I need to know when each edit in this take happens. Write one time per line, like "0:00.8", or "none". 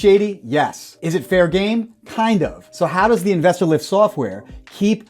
0:02.6